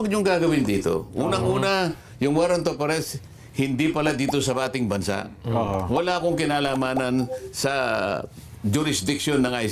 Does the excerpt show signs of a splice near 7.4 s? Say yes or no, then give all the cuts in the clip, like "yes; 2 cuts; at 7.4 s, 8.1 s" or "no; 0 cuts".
no; 0 cuts